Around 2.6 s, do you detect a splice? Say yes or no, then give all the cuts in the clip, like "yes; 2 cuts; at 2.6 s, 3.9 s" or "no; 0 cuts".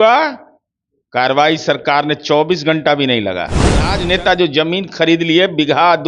no; 1 cut; at 3.9 s